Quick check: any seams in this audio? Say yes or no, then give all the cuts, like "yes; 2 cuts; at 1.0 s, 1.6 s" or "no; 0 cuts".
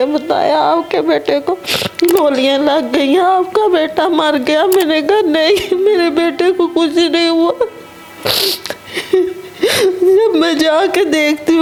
no; 0 cuts